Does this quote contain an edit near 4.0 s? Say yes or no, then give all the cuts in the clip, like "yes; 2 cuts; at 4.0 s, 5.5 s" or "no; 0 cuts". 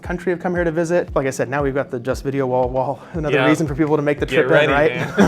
no; 1 cut; at 1.1 s